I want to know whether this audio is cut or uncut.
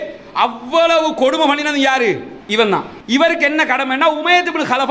cut